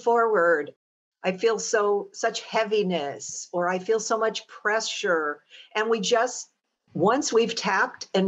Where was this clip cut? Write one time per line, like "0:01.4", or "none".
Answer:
0:06.9